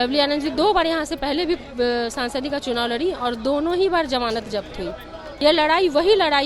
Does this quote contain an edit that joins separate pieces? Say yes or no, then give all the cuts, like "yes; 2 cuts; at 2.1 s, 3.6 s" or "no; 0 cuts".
yes; 1 cut; at 5.2 s